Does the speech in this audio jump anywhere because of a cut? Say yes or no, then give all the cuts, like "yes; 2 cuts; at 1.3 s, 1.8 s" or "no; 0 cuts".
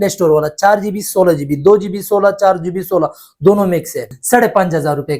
yes; 1 cut; at 4.1 s